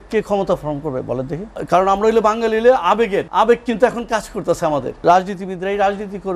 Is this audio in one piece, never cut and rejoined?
no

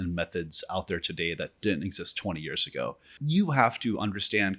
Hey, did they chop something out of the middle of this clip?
yes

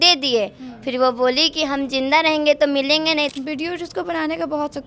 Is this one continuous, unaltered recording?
no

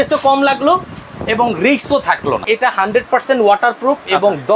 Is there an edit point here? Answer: yes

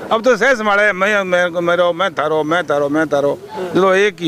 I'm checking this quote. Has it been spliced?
no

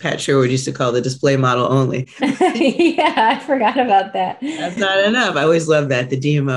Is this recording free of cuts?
yes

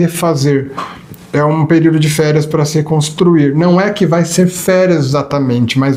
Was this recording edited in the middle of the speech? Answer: no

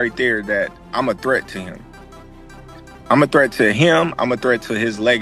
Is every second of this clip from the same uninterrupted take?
yes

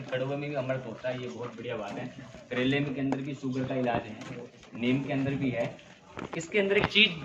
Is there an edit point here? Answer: no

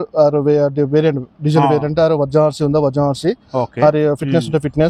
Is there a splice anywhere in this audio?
no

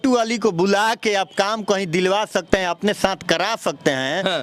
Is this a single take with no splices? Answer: yes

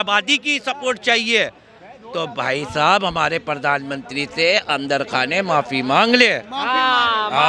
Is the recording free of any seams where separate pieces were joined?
yes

